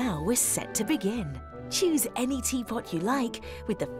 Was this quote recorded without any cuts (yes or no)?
yes